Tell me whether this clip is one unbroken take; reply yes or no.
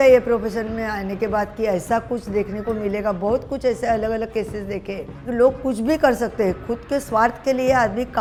yes